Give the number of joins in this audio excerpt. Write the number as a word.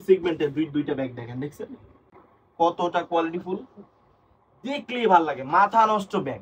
zero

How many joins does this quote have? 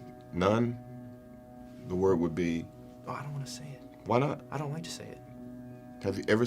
zero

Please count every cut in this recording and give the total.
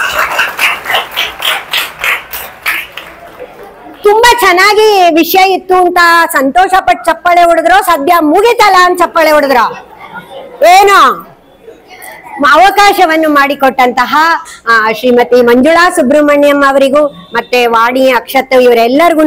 zero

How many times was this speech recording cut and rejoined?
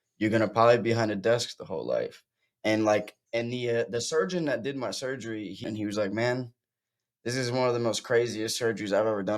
two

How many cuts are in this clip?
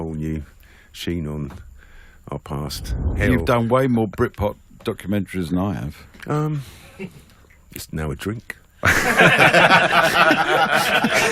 two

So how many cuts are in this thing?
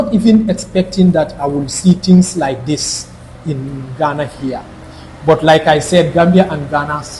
zero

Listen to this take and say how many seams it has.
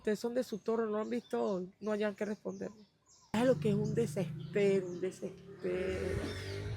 one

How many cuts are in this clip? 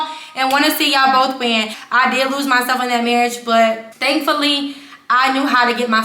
two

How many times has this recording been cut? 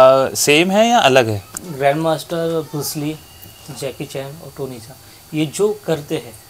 one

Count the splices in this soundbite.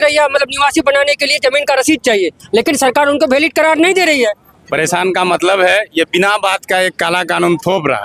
one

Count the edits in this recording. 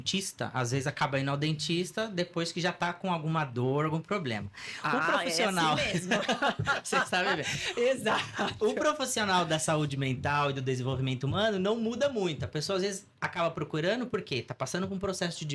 zero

